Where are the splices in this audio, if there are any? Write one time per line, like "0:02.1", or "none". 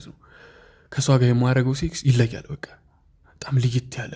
none